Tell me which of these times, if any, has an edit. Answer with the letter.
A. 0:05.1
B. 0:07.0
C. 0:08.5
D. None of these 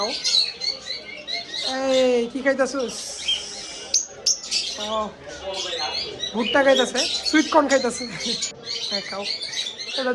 C